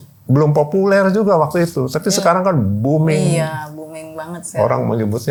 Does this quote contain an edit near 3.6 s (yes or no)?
no